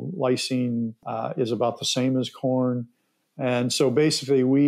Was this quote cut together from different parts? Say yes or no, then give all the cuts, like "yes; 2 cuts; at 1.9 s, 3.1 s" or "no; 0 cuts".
yes; 1 cut; at 1.0 s